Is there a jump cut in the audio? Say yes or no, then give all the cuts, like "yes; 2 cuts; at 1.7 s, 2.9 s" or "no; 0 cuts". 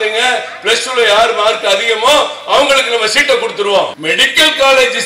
yes; 1 cut; at 4.0 s